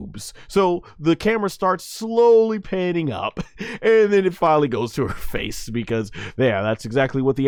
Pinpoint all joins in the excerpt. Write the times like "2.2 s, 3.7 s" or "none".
none